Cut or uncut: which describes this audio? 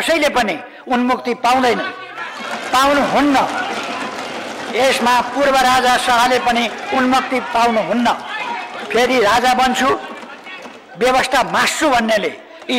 uncut